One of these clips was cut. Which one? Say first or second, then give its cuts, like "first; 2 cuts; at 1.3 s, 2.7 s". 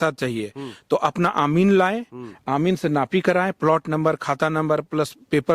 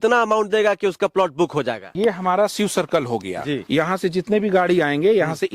second; 2 cuts; at 1.9 s, 3.6 s